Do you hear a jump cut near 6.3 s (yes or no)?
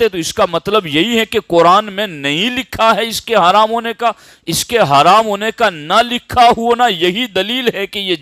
no